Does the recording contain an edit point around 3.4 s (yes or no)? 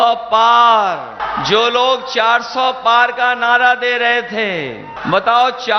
no